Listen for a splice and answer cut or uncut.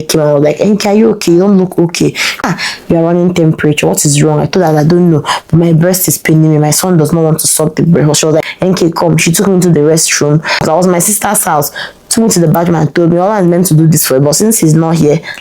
cut